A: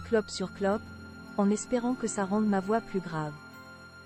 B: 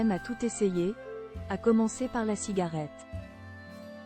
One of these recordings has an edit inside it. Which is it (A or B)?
B